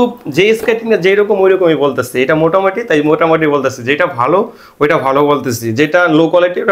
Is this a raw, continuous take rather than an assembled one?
yes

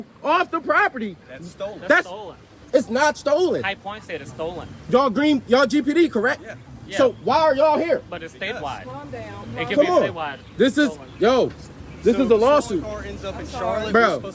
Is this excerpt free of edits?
yes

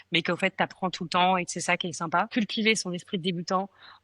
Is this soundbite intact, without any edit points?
no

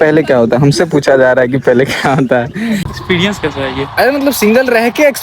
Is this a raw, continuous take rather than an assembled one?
no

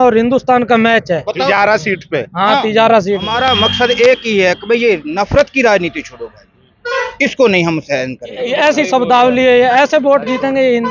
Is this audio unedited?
no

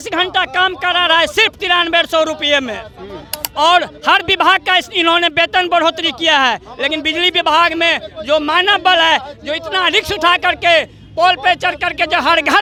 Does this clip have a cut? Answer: no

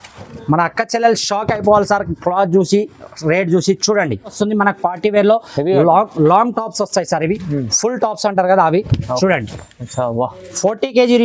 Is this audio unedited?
no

